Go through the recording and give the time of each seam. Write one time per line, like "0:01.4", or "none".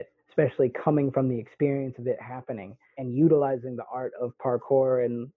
0:02.9

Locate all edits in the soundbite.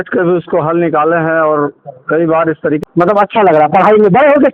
0:02.8

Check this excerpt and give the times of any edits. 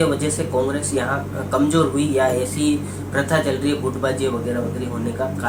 none

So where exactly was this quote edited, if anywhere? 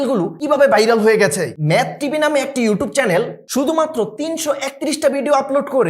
0:01.5

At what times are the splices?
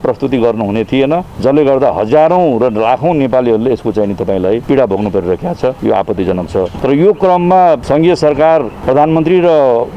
0:01.3
0:04.6
0:05.8
0:06.7
0:07.8
0:08.7

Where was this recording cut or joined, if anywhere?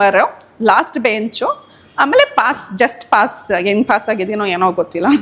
none

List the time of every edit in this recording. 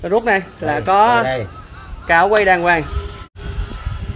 0:03.2

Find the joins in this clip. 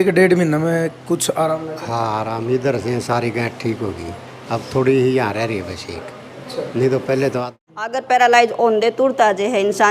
0:07.5

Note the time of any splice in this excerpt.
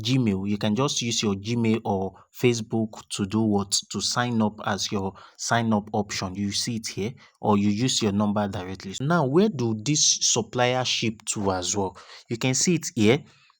0:09.0

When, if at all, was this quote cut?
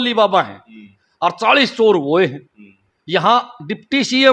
none

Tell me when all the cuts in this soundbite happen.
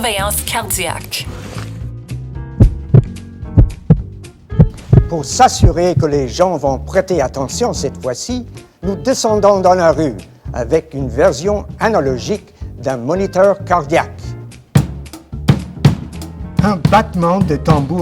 0:06.3

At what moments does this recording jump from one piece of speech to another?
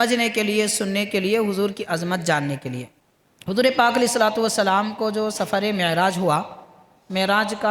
0:02.9

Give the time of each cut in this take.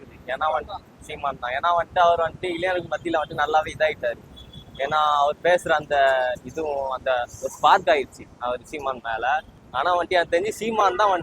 0:09.6

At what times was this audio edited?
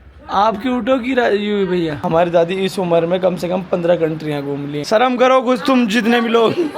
0:02.0
0:04.8

